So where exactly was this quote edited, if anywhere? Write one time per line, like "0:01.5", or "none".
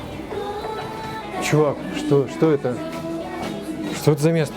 0:01.2